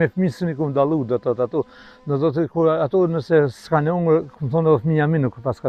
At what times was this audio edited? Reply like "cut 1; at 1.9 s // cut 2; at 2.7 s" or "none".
none